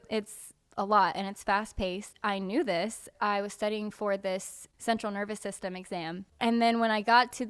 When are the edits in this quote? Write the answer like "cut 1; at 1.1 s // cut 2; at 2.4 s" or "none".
cut 1; at 2.1 s // cut 2; at 3.1 s // cut 3; at 4.6 s // cut 4; at 6.2 s